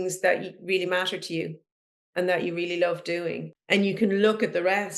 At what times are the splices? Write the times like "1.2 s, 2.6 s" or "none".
3.5 s